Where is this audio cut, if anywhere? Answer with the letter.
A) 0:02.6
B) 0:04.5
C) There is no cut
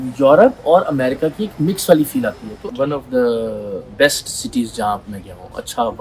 A